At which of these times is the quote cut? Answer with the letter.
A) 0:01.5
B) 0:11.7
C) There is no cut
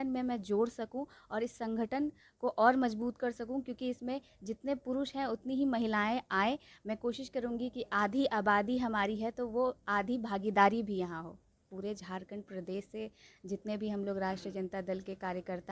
B